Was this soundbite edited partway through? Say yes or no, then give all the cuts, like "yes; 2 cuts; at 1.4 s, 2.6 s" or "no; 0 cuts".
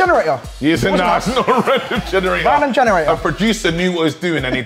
no; 0 cuts